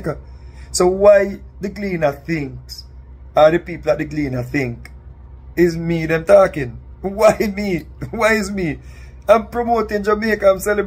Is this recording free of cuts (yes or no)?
yes